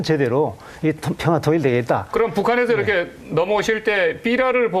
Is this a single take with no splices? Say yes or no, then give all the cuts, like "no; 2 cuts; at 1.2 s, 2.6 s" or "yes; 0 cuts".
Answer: no; 1 cut; at 2.7 s